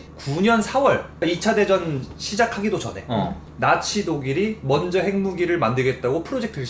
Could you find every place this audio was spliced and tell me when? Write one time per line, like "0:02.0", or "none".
0:01.2